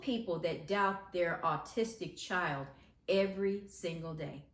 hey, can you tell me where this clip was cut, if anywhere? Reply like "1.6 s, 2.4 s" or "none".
none